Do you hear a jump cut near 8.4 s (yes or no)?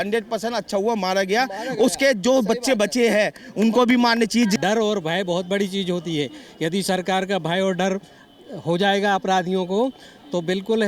no